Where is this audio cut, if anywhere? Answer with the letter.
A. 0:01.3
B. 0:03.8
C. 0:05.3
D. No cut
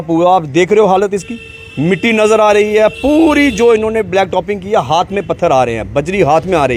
D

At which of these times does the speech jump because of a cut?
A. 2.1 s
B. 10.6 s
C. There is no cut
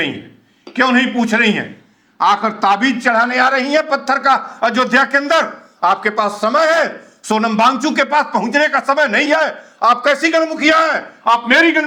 C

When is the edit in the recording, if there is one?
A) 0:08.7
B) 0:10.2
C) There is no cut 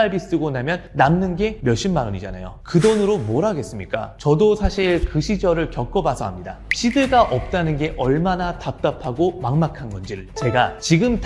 B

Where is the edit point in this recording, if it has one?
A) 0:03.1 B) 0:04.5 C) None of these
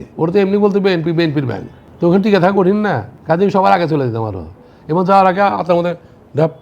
A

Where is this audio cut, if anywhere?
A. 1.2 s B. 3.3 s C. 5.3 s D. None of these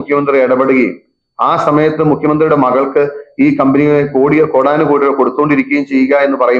D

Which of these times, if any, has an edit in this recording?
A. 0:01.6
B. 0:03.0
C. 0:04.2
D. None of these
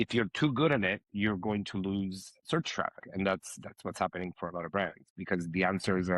B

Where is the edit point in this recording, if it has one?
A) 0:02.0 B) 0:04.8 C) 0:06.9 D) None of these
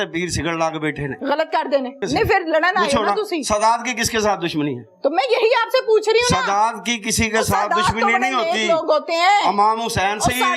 A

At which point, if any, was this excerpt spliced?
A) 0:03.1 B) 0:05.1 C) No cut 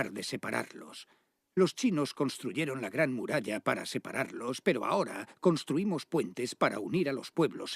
B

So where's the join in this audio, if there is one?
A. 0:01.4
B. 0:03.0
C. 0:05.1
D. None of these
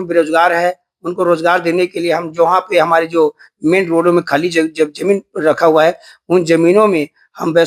D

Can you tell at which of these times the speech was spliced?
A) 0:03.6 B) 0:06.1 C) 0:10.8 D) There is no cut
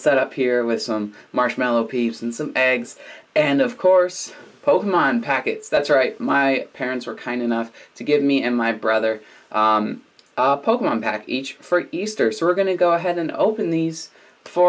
B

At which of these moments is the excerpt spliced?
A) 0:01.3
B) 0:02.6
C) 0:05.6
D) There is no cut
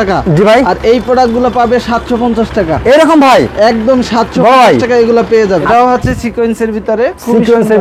C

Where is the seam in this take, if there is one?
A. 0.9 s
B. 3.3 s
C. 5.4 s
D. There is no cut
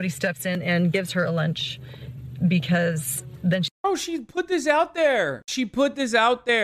C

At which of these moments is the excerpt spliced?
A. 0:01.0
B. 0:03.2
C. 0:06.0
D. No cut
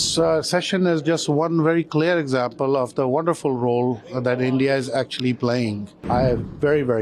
C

